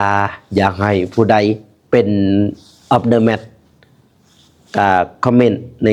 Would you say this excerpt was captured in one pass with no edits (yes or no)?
yes